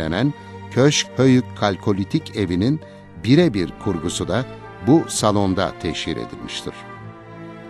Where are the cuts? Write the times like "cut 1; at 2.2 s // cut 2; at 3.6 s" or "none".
cut 1; at 6.7 s